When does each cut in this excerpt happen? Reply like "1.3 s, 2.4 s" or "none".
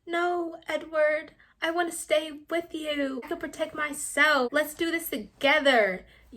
3.2 s, 4.5 s